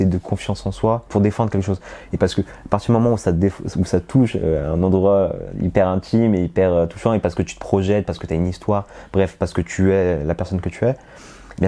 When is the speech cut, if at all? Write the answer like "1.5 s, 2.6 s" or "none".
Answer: 1.1 s

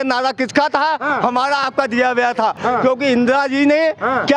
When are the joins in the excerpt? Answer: none

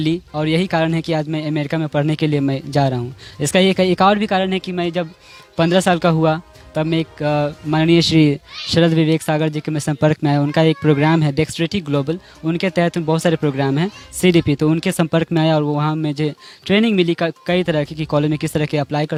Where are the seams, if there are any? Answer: none

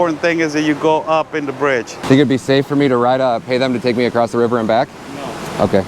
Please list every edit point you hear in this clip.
2.0 s

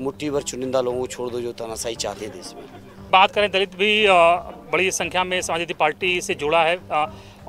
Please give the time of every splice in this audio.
3.1 s

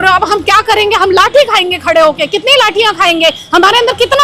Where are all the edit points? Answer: none

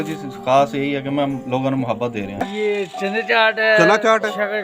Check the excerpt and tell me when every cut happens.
2.4 s

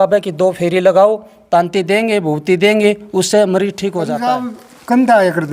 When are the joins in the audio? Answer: 4.1 s

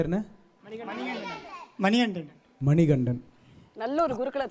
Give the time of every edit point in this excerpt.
none

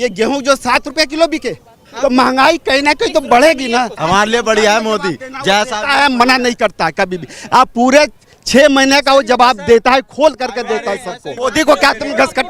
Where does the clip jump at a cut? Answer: 1.8 s, 4.0 s, 11.3 s

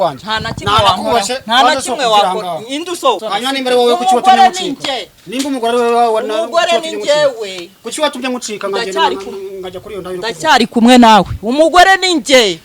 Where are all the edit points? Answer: 3.2 s

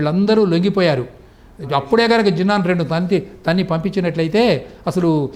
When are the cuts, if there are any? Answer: none

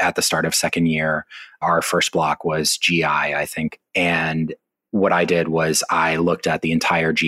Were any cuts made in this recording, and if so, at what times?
1.6 s

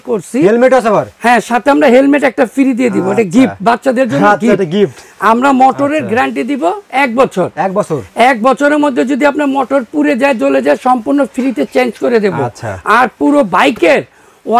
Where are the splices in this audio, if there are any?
none

